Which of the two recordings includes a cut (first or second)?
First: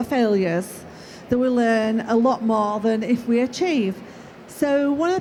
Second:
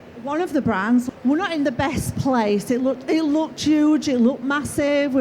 second